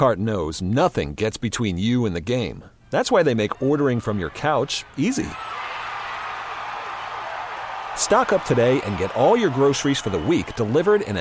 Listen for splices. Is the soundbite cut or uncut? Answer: uncut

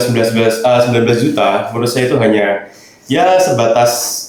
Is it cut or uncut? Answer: uncut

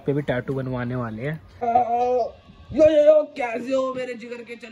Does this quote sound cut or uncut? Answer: cut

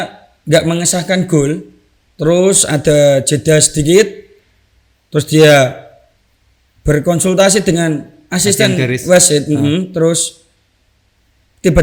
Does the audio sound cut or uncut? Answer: uncut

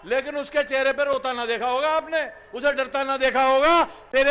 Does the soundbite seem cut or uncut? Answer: uncut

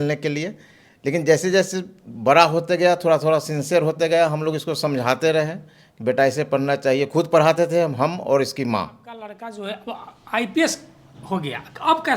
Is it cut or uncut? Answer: cut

